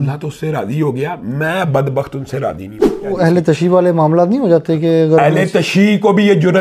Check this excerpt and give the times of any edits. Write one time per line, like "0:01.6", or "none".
0:03.1